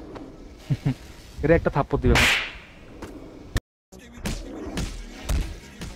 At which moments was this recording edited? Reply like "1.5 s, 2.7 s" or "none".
3.6 s